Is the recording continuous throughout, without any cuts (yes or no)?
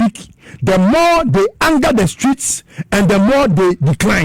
yes